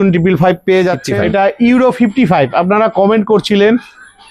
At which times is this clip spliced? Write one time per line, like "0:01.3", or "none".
0:01.1

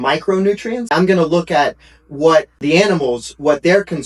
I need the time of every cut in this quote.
0:00.9
0:02.6

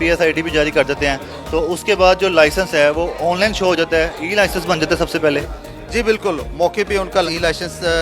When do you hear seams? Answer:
none

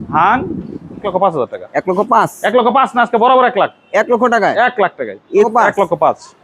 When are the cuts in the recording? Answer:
0:01.1
0:05.4

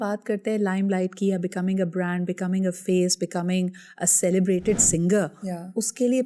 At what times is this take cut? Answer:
none

